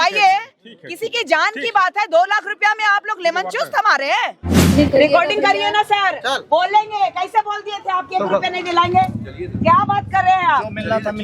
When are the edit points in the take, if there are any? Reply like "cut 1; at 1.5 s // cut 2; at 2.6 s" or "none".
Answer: cut 1; at 4.7 s